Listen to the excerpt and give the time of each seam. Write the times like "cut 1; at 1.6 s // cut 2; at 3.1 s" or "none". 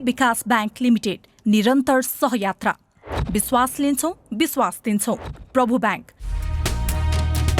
cut 1; at 6.5 s